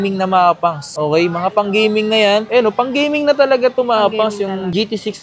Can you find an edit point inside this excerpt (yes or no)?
yes